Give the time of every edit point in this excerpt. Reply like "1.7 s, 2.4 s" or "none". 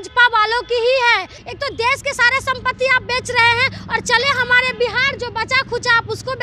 1.3 s